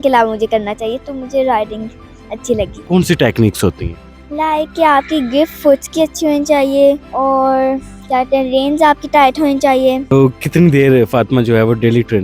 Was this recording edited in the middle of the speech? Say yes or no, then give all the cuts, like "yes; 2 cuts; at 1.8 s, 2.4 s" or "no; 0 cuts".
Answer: yes; 3 cuts; at 2.8 s, 7.1 s, 10.0 s